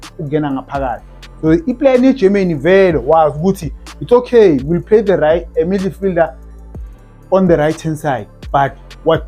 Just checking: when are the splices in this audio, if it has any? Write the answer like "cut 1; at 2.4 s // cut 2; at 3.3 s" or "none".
none